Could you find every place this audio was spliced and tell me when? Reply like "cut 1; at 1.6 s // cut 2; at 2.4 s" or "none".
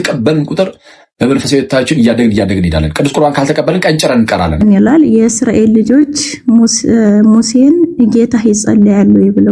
cut 1; at 4.6 s

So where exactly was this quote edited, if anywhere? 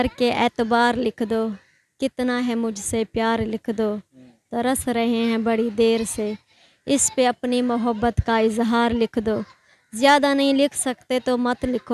none

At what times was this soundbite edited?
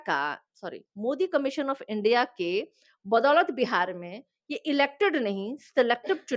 none

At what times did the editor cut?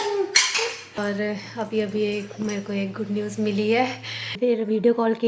cut 1; at 1.0 s // cut 2; at 4.3 s

